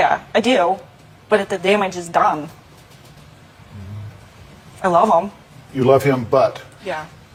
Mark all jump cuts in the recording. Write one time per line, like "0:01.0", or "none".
none